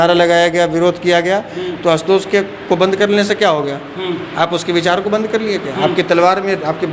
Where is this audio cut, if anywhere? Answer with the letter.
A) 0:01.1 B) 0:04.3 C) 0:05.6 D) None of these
D